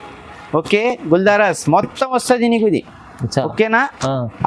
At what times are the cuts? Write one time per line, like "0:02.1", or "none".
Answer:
none